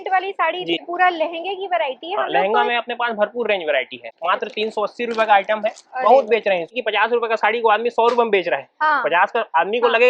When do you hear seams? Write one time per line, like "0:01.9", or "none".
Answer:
0:00.8
0:04.1
0:06.8